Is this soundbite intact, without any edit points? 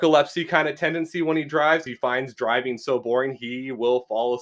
no; 1 cut; at 1.9 s

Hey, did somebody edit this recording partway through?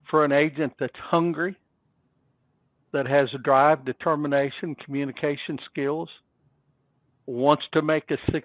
no; 0 cuts

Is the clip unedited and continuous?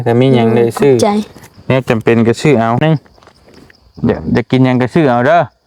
no; 1 cut; at 2.8 s

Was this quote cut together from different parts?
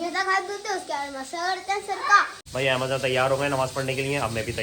yes; 1 cut; at 2.4 s

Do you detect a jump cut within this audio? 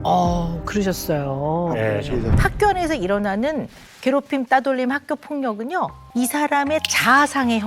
yes; 2 cuts; at 2.3 s, 6.0 s

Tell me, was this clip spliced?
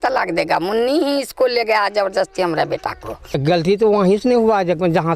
yes; 1 cut; at 3.4 s

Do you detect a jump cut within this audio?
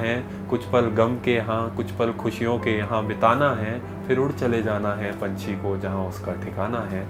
no; 0 cuts

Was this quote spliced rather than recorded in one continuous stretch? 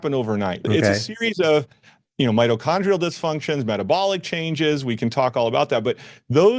no; 0 cuts

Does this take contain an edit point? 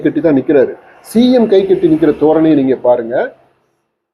no; 0 cuts

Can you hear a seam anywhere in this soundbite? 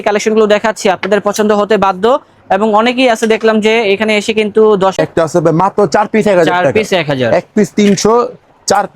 yes; 1 cut; at 5.0 s

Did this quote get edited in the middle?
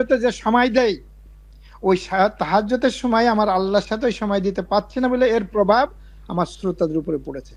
no; 0 cuts

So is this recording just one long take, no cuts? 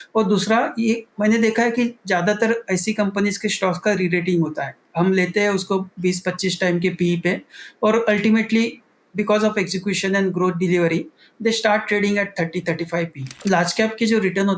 no; 1 cut; at 13.4 s

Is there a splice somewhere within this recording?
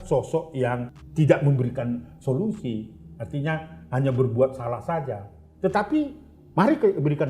yes; 1 cut; at 1.0 s

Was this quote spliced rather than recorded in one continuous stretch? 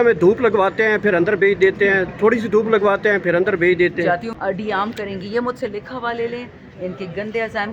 yes; 1 cut; at 4.3 s

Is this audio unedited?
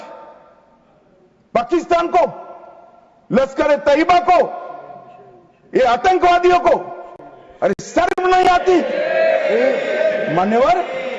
yes; 0 cuts

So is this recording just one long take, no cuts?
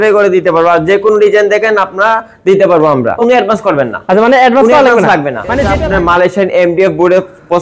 no; 2 cuts; at 3.1 s, 5.7 s

